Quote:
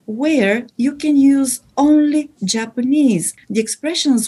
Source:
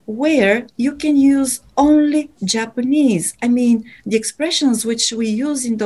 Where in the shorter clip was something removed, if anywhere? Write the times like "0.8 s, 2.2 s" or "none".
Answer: 3.3 s

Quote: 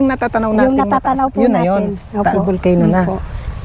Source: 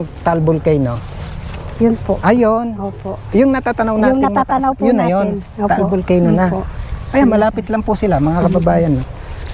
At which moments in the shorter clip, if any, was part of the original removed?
none

